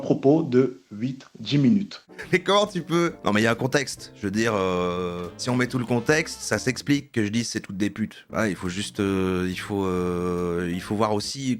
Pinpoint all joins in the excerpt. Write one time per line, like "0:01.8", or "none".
none